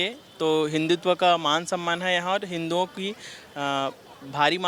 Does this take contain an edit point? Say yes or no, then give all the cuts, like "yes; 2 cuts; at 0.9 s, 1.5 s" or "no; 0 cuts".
no; 0 cuts